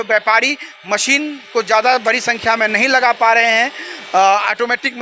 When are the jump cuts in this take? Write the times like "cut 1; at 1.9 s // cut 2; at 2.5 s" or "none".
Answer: none